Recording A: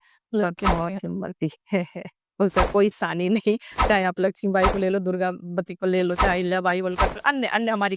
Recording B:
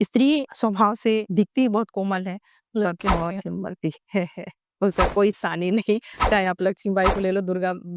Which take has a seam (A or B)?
B